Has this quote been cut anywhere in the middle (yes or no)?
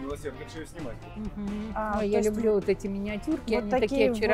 yes